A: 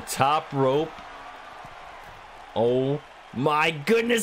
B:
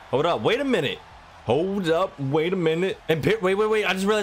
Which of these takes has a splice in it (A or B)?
B